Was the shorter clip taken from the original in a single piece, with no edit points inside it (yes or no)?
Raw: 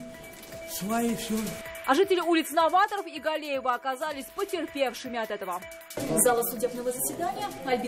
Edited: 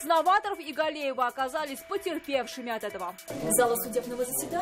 no